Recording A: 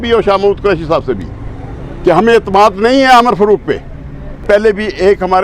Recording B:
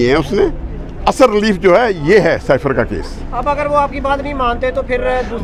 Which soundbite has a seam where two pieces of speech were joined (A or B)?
A